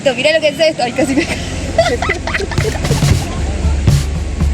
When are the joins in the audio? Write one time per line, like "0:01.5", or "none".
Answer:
none